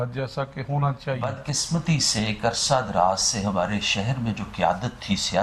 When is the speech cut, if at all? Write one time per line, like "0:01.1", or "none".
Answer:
0:01.5